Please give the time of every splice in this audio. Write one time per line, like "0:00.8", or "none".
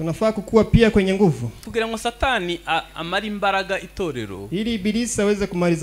0:01.6